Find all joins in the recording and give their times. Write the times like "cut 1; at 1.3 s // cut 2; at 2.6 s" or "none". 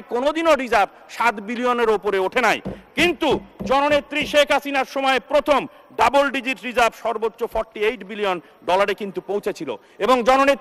none